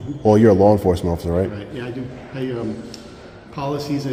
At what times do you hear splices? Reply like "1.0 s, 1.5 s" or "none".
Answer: none